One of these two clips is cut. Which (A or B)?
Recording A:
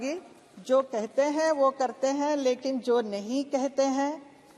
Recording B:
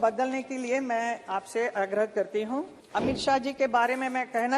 B